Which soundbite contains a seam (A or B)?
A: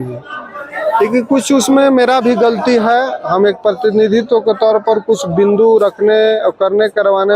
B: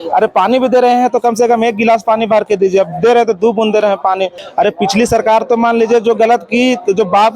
B